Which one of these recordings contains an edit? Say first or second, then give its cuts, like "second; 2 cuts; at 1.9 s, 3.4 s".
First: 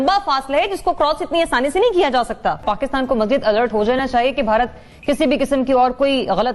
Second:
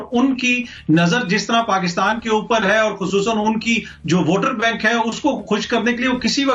first; 1 cut; at 2.6 s